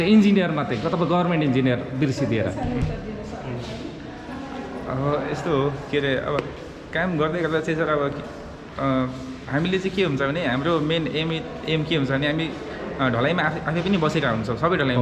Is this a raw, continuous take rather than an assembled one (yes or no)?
yes